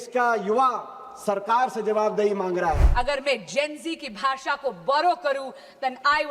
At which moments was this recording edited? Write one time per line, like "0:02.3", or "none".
0:02.9